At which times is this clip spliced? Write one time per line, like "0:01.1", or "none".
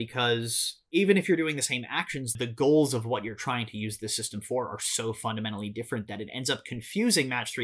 0:02.4